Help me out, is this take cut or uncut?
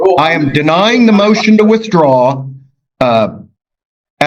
uncut